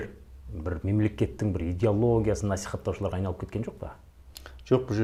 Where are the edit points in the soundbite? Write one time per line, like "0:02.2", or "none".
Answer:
none